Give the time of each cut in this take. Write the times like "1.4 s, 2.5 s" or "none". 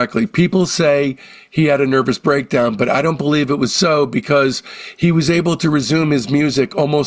none